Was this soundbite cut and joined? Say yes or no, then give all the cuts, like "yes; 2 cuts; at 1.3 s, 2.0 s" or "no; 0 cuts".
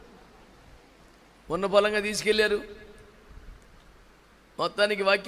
yes; 1 cut; at 1.4 s